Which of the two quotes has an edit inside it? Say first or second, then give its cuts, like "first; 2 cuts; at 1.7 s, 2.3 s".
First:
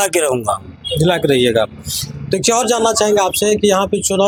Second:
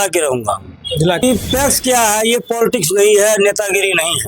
second; 1 cut; at 1.2 s